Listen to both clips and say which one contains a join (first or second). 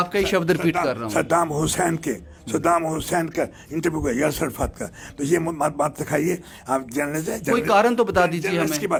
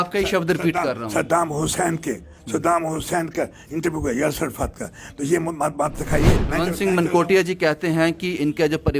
second